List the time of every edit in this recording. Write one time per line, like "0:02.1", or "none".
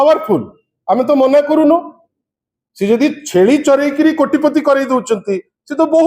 none